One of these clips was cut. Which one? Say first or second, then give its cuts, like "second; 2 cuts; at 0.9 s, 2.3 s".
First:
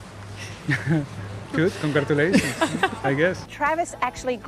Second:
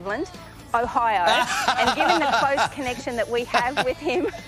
first; 1 cut; at 3.5 s